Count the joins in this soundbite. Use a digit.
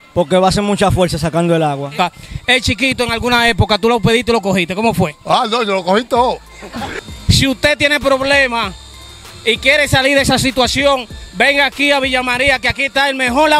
2